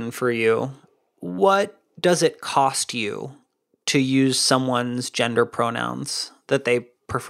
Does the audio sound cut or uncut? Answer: uncut